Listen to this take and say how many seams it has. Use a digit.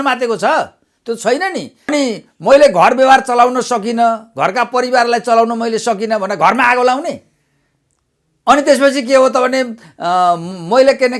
1